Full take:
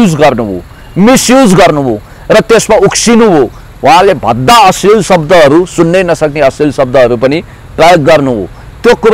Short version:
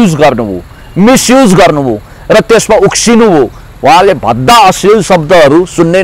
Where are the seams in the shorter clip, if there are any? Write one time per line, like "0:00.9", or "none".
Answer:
none